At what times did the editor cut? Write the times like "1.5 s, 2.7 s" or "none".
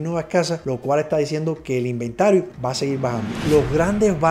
3.4 s